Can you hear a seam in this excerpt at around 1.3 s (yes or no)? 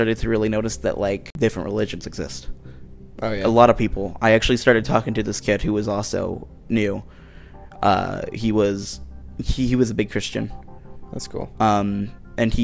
yes